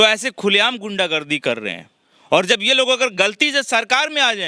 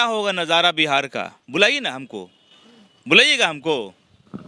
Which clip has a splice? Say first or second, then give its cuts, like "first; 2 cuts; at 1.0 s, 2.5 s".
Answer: second; 1 cut; at 1.4 s